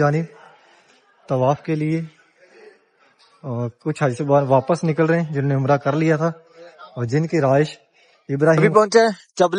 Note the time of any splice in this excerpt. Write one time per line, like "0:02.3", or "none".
0:08.6